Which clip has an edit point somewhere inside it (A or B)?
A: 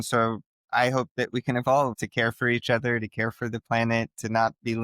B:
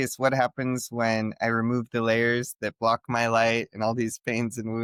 A